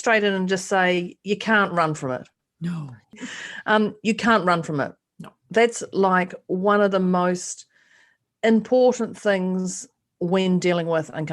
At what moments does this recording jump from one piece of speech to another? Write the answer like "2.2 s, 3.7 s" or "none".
3.2 s